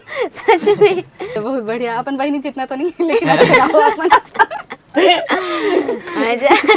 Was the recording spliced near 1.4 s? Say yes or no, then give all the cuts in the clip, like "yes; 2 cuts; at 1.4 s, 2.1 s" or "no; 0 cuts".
yes; 1 cut; at 1.4 s